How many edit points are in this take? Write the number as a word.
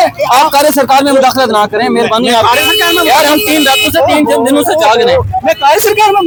zero